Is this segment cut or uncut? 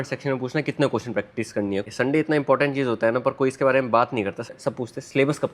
cut